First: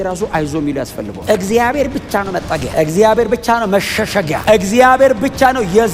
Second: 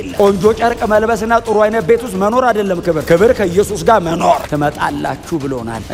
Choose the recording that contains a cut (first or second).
first